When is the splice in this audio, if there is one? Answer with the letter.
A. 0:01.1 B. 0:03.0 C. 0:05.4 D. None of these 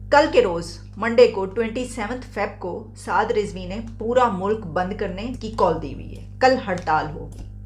C